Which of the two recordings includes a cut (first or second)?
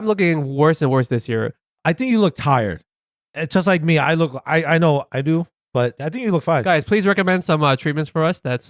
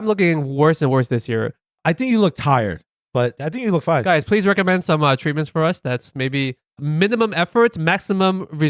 second